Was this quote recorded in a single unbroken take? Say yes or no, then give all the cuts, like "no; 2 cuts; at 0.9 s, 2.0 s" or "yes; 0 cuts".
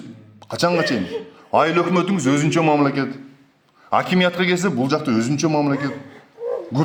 yes; 0 cuts